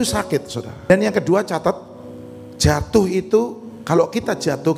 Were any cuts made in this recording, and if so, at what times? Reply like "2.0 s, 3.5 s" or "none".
0.9 s